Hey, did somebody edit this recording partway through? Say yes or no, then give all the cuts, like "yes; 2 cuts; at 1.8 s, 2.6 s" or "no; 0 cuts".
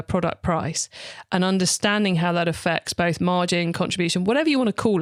no; 0 cuts